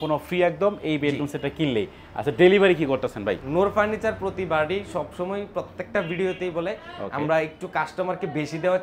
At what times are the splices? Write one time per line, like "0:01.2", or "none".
none